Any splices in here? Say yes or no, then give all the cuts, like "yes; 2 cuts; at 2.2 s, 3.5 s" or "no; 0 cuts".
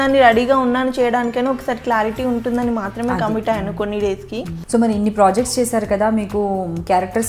yes; 1 cut; at 4.6 s